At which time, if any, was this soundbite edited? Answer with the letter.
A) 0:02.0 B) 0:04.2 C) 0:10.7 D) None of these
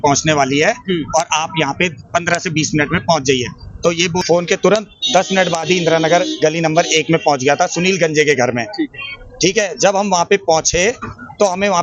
B